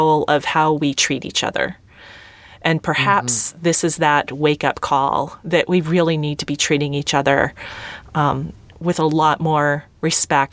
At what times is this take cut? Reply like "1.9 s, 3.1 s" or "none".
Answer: none